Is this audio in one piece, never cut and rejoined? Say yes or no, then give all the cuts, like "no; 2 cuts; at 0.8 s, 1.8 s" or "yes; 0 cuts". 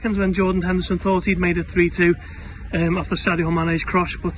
yes; 0 cuts